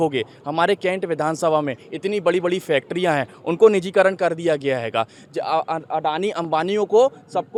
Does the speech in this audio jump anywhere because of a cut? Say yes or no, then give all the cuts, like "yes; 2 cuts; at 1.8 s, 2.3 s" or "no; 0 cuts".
no; 0 cuts